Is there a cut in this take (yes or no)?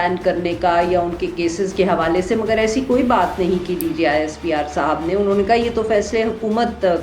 no